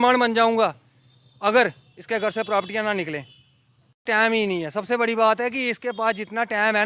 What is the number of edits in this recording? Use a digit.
1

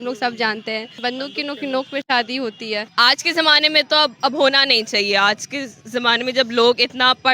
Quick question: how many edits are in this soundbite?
2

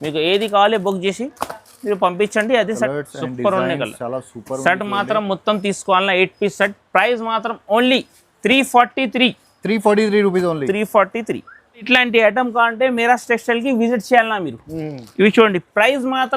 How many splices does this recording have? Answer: 2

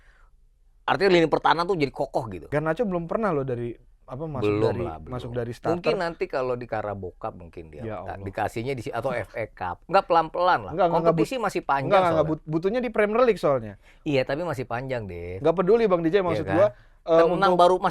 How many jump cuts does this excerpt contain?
1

